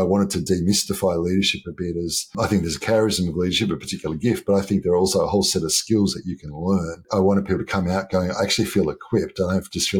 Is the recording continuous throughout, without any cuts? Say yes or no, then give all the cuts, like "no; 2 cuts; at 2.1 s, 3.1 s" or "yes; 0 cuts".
no; 2 cuts; at 2.3 s, 7.0 s